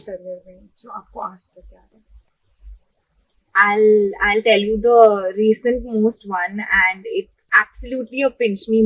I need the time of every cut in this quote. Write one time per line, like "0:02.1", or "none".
none